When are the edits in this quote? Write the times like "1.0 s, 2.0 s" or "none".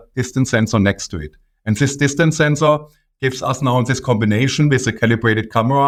none